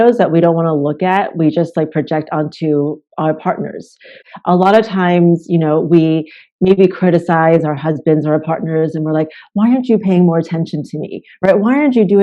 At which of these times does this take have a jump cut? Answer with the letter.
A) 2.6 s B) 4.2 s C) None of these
B